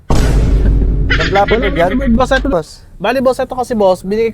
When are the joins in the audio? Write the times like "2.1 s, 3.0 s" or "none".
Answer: 2.5 s